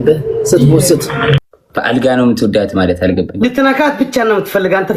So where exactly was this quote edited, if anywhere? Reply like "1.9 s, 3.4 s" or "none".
1.5 s